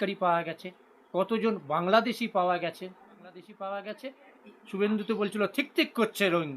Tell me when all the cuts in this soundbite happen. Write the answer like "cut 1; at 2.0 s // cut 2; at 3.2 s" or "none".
cut 1; at 3.5 s

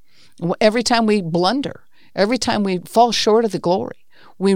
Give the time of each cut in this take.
cut 1; at 2.8 s

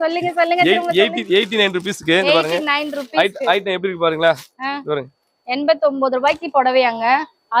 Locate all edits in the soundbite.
none

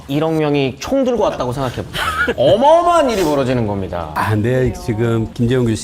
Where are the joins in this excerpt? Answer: cut 1; at 2.3 s // cut 2; at 4.1 s

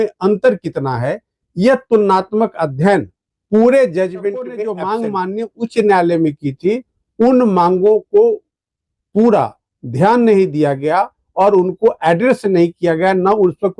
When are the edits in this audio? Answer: cut 1; at 4.6 s

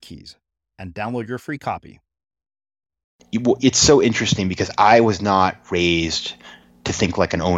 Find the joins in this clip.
cut 1; at 3.1 s

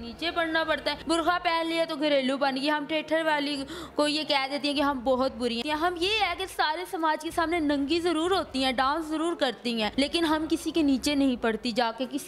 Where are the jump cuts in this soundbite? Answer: cut 1; at 0.9 s // cut 2; at 5.6 s // cut 3; at 9.9 s

